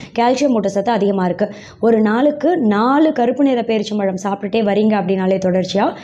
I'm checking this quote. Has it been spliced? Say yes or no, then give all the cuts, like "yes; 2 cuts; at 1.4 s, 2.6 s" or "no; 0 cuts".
no; 0 cuts